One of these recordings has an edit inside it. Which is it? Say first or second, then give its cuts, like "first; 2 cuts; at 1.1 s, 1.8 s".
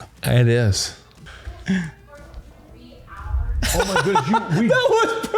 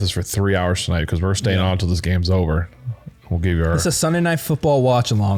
first; 1 cut; at 1.5 s